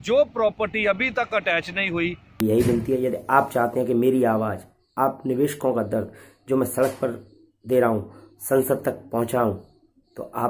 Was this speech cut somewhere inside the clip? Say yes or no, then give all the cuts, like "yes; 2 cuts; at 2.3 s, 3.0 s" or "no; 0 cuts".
yes; 1 cut; at 2.4 s